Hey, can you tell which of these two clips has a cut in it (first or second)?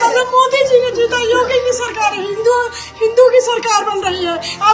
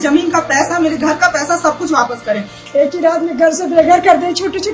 second